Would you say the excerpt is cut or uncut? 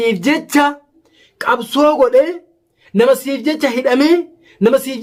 uncut